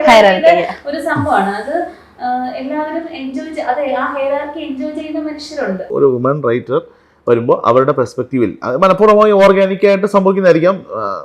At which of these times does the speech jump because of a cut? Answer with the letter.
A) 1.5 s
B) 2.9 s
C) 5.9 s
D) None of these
C